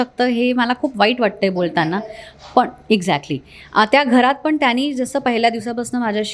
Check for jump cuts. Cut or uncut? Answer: uncut